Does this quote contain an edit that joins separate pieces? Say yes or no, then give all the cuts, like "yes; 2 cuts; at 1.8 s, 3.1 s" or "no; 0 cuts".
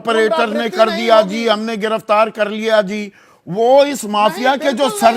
no; 0 cuts